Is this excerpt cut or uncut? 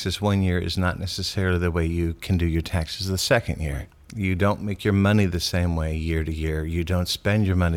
uncut